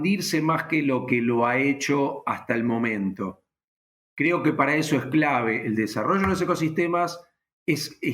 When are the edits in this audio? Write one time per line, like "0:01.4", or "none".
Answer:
none